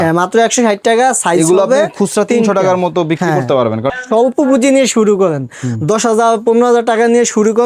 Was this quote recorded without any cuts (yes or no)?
no